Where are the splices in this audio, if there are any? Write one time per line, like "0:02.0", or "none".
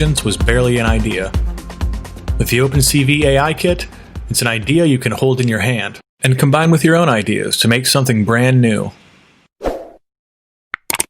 0:09.8